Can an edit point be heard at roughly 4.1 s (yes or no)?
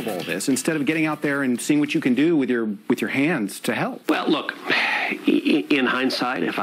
yes